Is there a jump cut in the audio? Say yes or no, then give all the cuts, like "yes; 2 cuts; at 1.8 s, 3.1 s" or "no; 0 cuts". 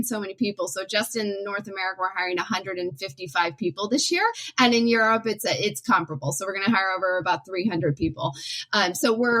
yes; 1 cut; at 4.4 s